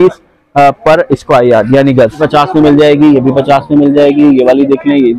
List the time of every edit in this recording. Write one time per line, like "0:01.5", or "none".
0:02.2